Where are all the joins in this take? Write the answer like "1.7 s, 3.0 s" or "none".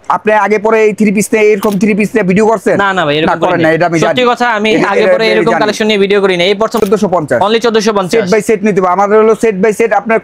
6.8 s